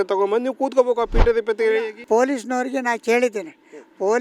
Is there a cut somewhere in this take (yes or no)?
yes